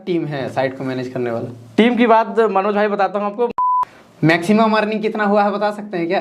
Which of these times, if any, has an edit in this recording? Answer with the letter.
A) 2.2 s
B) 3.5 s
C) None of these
B